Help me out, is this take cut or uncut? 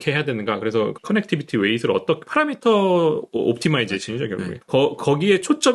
cut